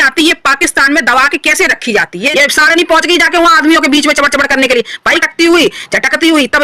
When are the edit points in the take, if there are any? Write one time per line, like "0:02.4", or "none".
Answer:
0:02.3
0:05.2